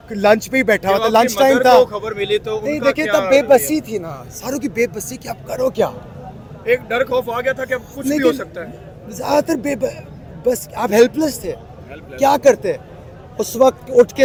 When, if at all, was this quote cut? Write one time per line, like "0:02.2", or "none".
none